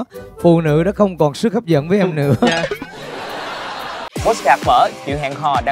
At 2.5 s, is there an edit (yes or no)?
no